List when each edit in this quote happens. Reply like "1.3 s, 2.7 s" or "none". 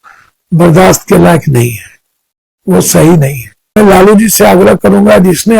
3.8 s